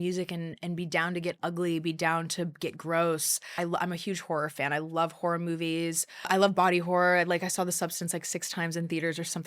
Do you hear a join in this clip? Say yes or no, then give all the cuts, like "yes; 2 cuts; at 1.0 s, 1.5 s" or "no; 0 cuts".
yes; 2 cuts; at 3.5 s, 6.3 s